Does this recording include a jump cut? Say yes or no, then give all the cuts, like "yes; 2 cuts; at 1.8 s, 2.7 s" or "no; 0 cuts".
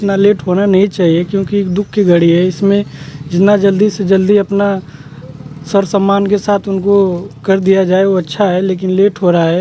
no; 0 cuts